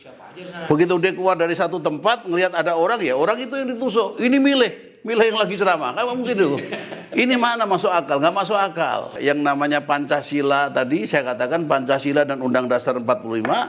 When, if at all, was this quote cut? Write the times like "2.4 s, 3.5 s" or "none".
9.1 s